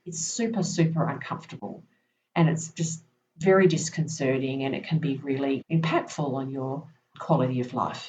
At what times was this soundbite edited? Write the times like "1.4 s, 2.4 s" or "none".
none